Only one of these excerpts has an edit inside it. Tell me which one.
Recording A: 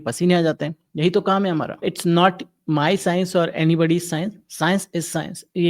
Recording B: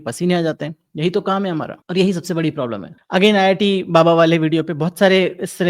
A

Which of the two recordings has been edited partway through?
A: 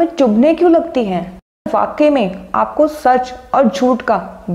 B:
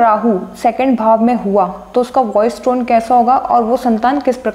A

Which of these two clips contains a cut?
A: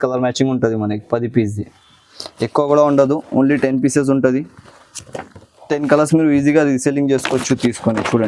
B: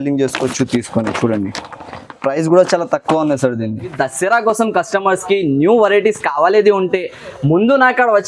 B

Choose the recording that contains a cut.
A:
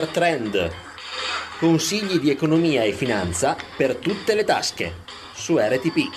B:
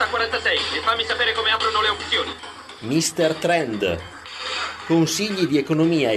B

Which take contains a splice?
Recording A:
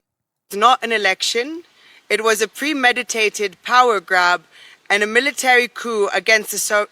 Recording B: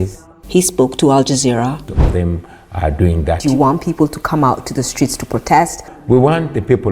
B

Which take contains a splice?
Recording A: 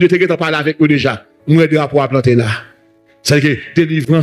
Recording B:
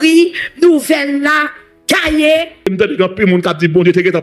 B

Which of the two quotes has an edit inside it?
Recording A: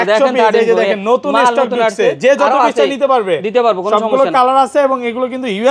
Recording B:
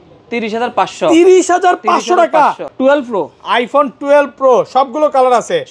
B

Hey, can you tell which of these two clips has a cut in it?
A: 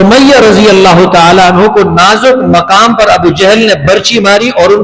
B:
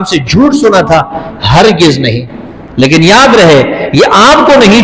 B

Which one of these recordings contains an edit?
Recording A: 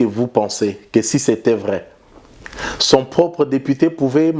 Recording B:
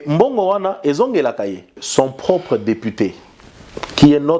B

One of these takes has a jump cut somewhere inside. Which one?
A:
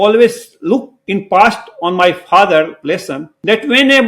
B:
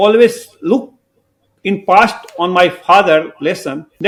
A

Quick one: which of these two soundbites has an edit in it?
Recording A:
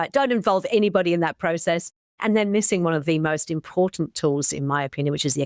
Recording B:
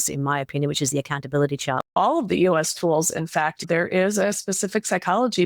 B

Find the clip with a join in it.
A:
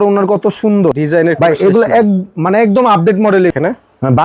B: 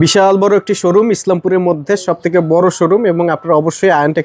A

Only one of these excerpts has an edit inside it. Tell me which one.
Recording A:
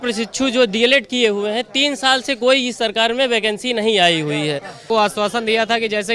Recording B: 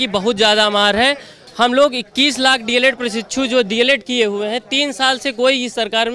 A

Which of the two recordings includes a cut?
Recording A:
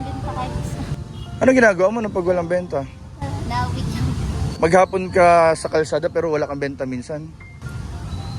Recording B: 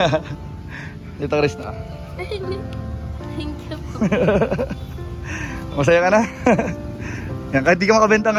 A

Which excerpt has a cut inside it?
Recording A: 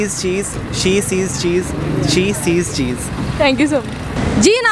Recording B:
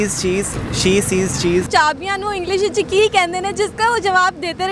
B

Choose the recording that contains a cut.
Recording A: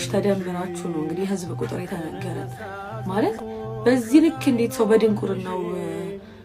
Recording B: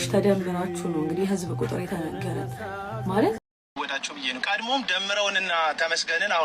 B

